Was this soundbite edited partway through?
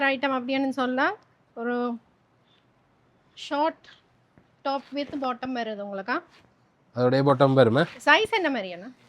no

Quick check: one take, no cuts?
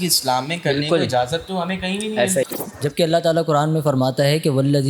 no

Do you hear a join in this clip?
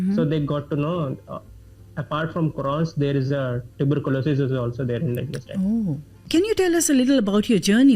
yes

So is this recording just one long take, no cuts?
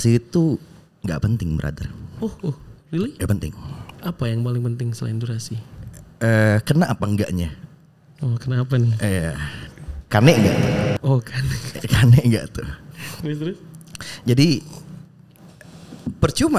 yes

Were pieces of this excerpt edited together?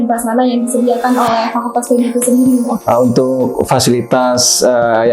yes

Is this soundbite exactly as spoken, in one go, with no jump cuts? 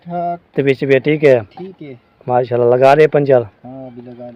yes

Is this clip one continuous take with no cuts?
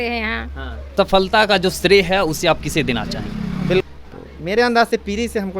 no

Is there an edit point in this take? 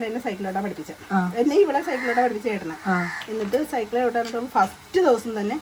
no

